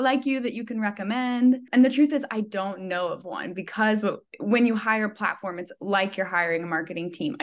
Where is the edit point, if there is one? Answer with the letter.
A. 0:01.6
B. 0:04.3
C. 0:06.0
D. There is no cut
A